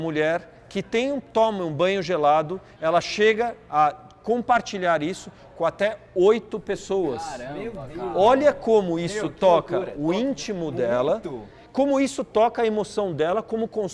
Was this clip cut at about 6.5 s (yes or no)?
no